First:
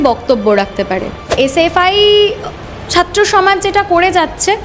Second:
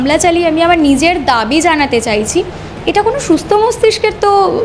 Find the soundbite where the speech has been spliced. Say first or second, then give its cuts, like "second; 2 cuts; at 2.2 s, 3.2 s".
first; 1 cut; at 1.3 s